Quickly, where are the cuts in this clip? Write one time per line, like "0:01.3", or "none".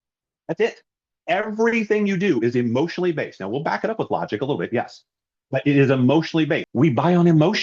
0:06.7